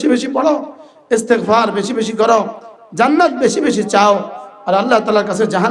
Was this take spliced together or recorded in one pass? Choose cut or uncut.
uncut